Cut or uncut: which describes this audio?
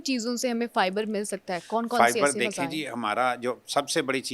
uncut